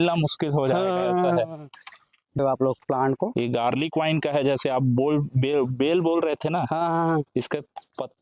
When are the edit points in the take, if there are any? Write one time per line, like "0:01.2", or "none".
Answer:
0:02.4